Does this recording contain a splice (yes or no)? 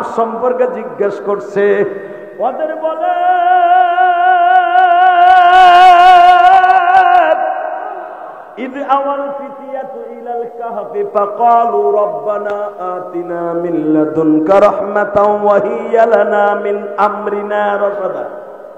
no